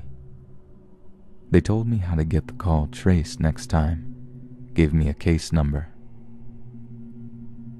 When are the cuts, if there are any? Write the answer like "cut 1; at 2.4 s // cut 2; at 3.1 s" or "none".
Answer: cut 1; at 5.1 s